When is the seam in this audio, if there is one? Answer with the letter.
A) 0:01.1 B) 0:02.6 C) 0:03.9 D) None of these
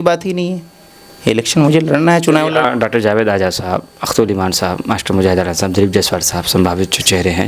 B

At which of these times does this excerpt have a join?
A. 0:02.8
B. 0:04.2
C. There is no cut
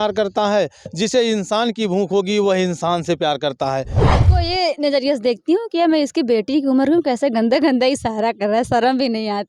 B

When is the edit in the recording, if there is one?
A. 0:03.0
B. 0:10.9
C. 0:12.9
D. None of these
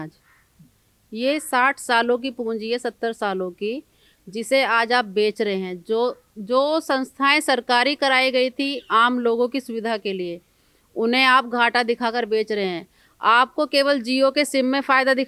D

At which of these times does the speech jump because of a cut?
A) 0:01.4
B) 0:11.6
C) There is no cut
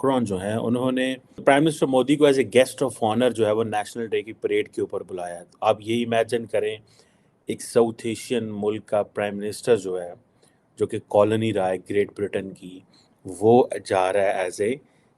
A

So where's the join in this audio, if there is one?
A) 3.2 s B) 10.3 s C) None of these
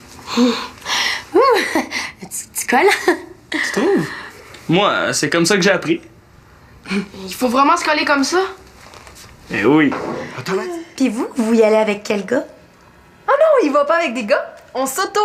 B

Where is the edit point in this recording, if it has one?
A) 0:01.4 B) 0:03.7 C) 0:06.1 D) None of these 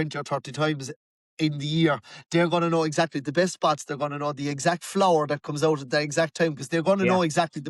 D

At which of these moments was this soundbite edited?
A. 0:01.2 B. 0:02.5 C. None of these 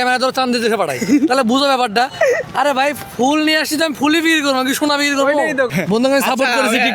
C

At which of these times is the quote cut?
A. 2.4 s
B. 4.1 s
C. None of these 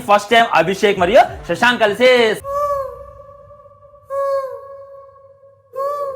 A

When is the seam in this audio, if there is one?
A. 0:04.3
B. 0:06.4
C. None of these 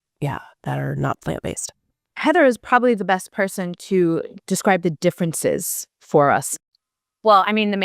B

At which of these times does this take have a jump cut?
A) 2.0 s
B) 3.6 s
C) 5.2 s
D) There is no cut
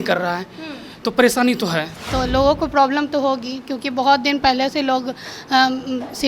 A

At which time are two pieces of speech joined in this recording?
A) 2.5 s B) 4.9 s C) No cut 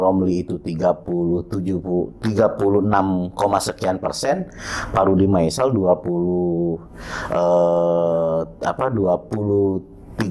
C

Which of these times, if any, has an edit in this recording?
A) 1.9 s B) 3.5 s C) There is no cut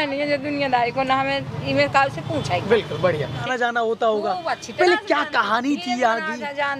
B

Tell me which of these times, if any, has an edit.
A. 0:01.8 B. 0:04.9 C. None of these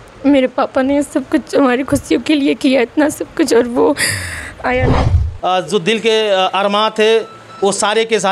B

